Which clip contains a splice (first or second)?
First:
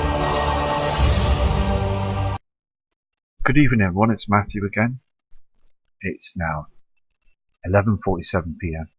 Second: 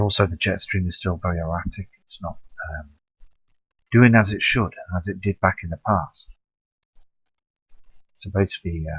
second